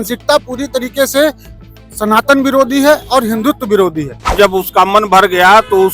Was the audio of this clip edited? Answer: yes; 1 cut; at 4.3 s

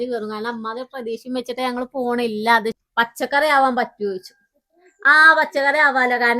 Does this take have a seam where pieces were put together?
yes; 1 cut; at 2.7 s

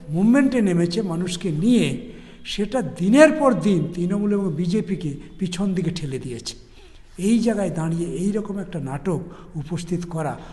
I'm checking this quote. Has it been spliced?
no; 0 cuts

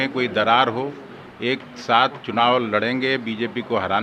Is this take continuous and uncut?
yes; 0 cuts

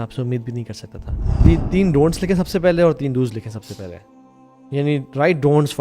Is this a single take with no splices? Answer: no; 1 cut; at 1.4 s

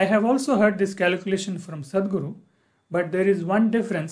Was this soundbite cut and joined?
no; 0 cuts

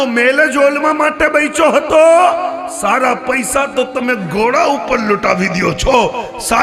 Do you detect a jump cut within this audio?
no; 0 cuts

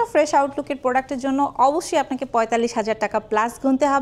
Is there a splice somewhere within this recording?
no; 0 cuts

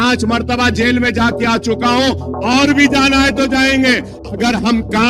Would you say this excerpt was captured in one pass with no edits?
no; 1 cut; at 4.2 s

